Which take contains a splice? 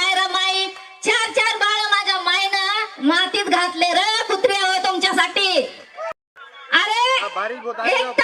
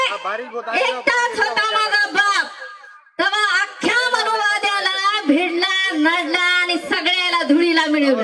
first; 1 cut; at 6.2 s

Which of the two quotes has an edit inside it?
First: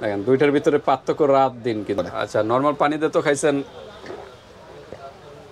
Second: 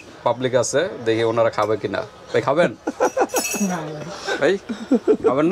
first; 1 cut; at 1.9 s

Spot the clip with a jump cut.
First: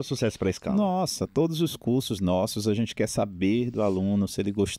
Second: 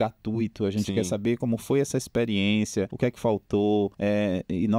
second; 2 cuts; at 2.9 s, 3.9 s

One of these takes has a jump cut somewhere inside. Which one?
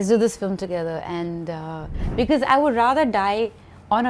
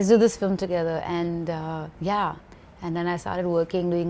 first; 1 cut; at 1.9 s

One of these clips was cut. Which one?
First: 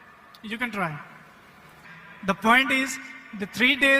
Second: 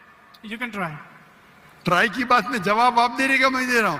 first; 1 cut; at 1.7 s

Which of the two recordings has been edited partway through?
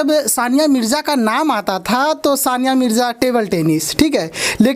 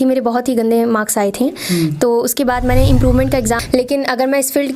second; 1 cut; at 3.6 s

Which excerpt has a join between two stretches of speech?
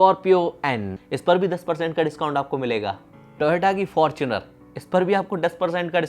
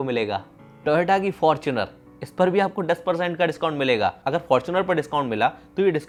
first; 1 cut; at 0.9 s

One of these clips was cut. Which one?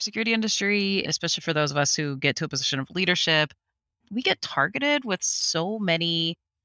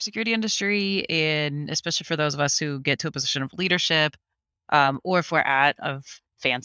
first; 2 cuts; at 1.1 s, 3.9 s

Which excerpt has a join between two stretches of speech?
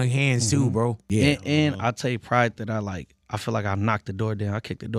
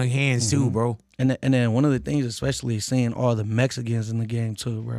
first; 1 cut; at 1.0 s

